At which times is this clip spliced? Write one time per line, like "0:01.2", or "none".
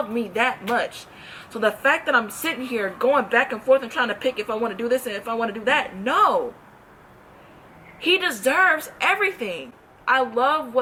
none